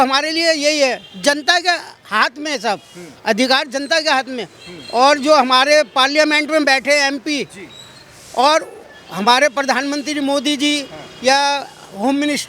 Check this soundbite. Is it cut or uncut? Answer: uncut